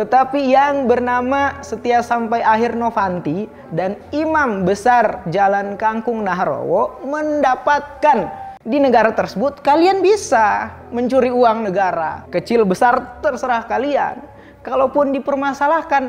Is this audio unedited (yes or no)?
no